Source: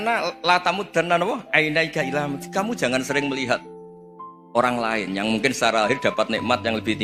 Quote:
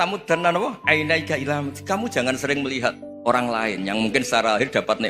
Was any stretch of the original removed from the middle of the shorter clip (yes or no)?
yes